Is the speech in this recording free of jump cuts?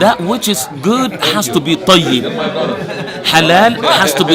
yes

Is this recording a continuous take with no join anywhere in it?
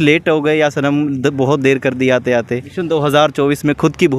no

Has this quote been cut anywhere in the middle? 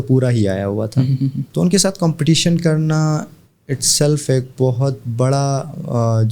yes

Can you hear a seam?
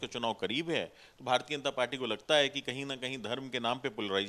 no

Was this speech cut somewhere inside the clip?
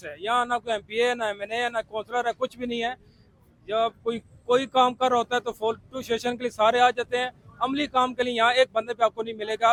no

